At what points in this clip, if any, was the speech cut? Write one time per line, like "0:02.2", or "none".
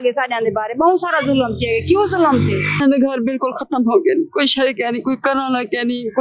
0:02.8